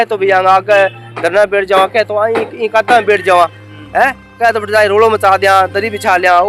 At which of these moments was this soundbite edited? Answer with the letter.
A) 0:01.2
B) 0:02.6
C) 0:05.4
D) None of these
D